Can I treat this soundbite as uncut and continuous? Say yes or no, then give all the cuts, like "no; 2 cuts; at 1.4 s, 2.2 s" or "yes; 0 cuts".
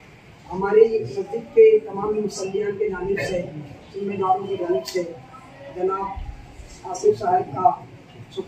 yes; 0 cuts